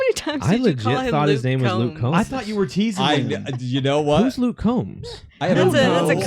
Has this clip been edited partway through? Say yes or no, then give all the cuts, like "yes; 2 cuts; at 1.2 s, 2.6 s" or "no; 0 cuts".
no; 0 cuts